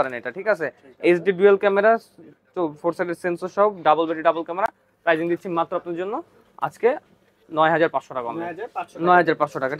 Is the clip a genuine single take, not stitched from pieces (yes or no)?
yes